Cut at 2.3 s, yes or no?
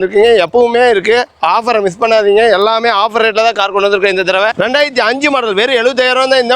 no